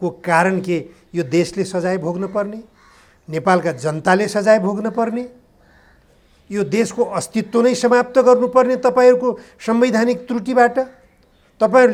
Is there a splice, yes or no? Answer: no